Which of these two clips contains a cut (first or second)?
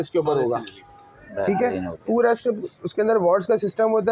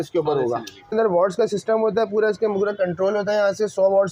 second